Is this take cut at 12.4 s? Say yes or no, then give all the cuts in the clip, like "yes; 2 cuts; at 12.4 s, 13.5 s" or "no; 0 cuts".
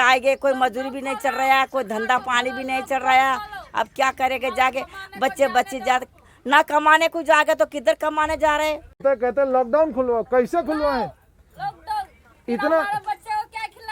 no; 1 cut; at 9.0 s